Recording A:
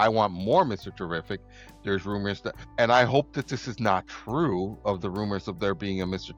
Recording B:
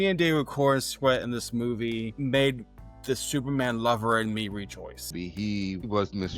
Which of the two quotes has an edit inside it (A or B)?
B